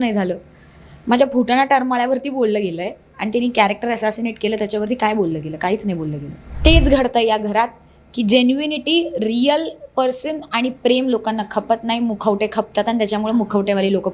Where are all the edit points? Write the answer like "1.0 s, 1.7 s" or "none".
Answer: 6.6 s